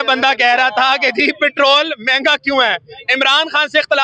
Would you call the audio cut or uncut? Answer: uncut